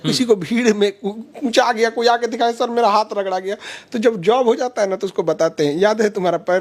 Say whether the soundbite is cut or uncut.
uncut